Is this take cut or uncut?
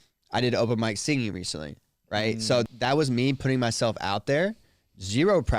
cut